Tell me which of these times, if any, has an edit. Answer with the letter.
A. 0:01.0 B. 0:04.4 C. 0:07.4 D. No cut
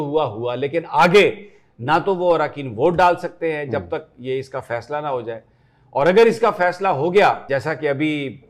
C